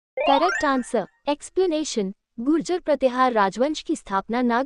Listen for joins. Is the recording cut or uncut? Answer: uncut